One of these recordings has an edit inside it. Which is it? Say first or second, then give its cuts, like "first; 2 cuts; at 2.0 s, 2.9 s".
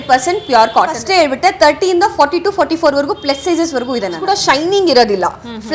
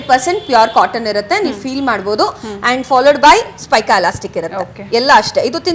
first; 2 cuts; at 1.0 s, 4.2 s